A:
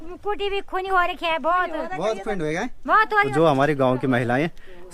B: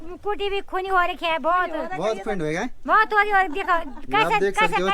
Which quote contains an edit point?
A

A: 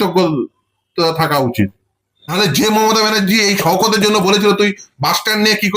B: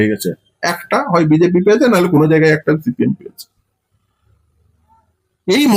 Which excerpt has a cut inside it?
A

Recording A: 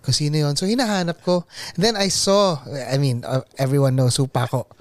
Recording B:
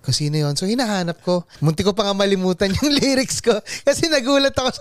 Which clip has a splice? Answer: B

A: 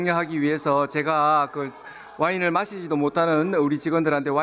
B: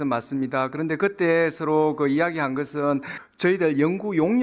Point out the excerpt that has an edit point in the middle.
B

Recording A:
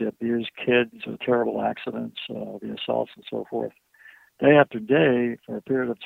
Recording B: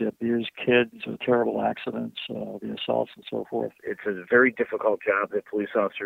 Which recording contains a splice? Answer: B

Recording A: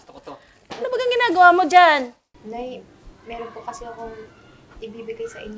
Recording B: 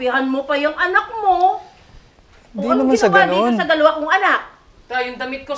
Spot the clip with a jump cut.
A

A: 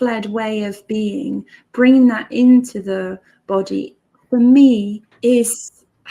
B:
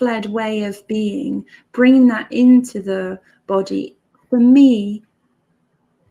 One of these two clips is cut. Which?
A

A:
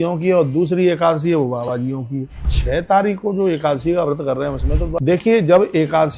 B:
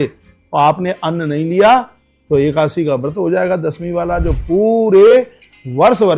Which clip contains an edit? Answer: A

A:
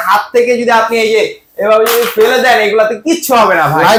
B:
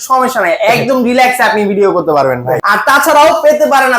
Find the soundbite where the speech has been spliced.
B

